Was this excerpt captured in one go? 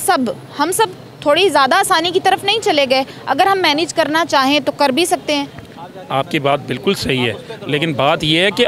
yes; 0 cuts

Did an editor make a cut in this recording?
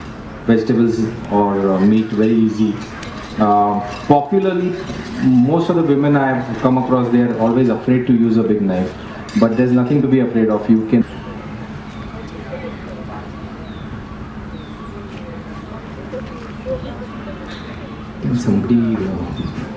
no; 0 cuts

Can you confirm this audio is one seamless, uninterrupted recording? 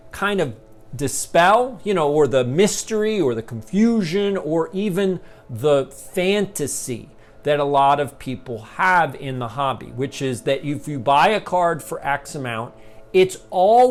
yes; 0 cuts

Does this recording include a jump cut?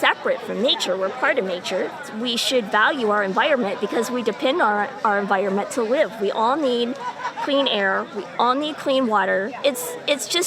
yes; 2 cuts; at 2.0 s, 9.5 s

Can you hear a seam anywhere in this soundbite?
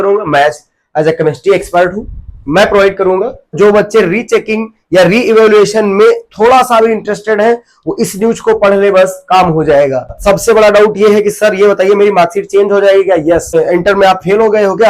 yes; 3 cuts; at 3.6 s, 10.2 s, 13.5 s

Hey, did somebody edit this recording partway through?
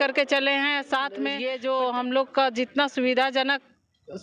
yes; 1 cut; at 1.4 s

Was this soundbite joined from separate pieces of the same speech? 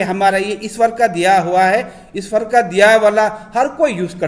no; 0 cuts

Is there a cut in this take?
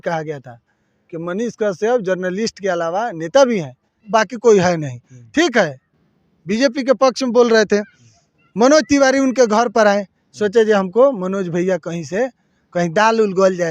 yes; 1 cut; at 3.9 s

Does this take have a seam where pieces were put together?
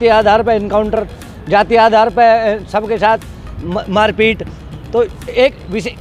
no; 0 cuts

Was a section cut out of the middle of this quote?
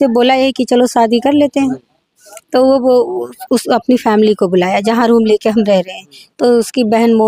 no; 0 cuts

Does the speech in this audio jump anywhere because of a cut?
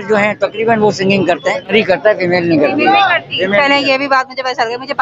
no; 0 cuts

